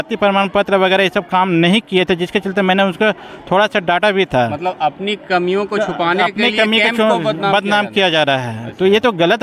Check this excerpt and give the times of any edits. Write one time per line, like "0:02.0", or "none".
none